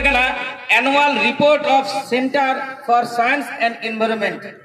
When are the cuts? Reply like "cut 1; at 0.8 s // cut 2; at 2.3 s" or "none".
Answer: none